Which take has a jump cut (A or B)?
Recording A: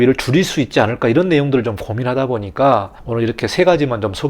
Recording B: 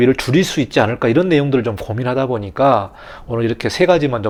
A